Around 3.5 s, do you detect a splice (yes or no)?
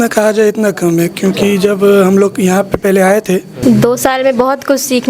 yes